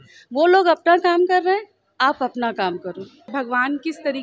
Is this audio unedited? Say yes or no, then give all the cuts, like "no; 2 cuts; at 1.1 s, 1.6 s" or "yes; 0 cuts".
no; 1 cut; at 3.3 s